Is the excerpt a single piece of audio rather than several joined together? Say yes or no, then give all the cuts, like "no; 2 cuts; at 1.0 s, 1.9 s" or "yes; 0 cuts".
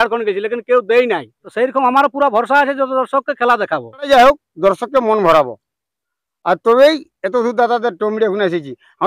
no; 2 cuts; at 1.4 s, 4.1 s